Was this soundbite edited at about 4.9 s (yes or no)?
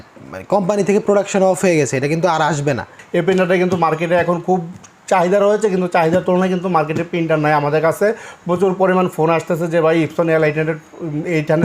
no